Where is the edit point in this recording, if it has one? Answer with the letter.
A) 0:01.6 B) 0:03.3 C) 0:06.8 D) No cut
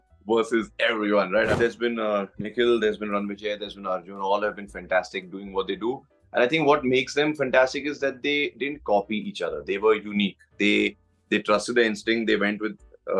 A